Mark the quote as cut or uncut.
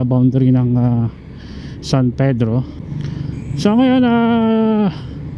cut